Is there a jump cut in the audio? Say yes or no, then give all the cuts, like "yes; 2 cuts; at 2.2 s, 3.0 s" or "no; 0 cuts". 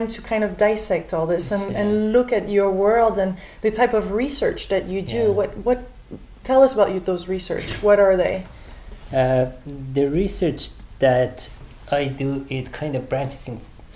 no; 0 cuts